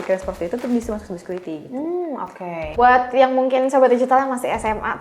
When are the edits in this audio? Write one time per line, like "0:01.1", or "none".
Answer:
0:02.8